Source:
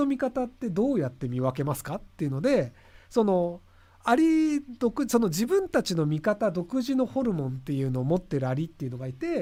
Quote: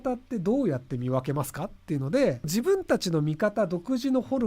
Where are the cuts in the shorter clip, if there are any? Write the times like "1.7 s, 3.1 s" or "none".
2.5 s